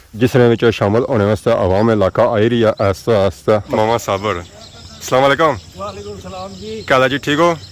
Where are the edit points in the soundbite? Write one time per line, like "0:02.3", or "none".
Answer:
0:03.7